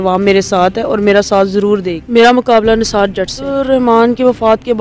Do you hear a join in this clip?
yes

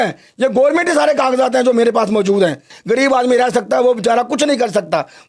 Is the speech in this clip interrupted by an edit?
yes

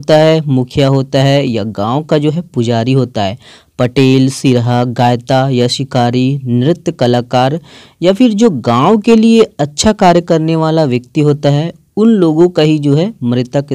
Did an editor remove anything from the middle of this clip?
no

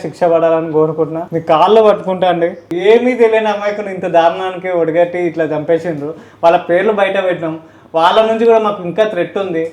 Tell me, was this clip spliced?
yes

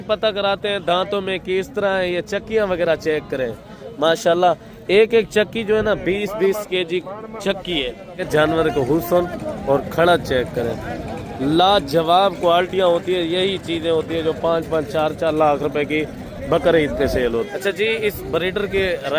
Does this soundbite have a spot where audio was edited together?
yes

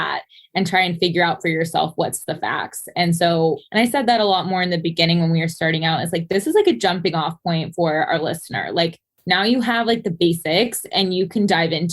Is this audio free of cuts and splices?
no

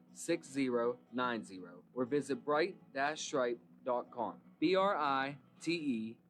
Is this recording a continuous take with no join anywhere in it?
yes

